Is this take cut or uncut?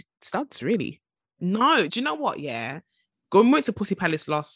cut